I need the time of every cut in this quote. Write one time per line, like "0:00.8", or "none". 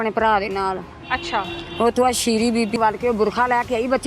0:02.8

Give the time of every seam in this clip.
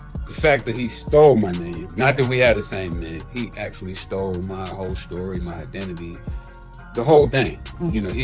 none

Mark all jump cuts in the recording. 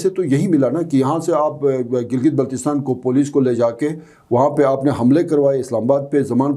none

